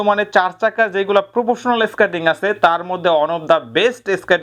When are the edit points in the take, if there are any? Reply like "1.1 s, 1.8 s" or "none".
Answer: none